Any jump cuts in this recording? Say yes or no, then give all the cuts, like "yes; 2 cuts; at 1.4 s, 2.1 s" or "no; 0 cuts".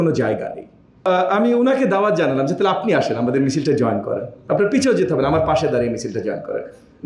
yes; 1 cut; at 1.1 s